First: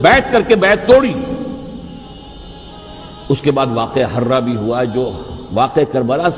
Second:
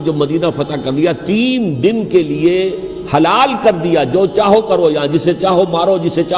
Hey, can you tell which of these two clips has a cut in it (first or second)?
first